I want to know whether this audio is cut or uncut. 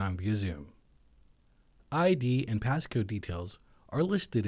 uncut